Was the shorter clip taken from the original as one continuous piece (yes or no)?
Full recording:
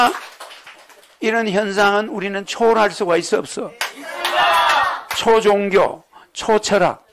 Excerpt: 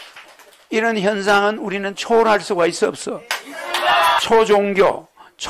no